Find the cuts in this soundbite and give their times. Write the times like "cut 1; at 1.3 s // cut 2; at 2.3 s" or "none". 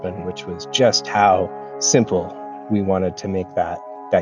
none